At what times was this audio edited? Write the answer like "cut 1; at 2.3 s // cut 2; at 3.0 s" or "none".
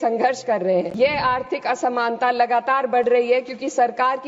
cut 1; at 0.9 s